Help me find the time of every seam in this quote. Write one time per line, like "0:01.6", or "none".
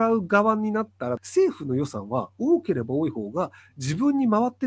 0:01.2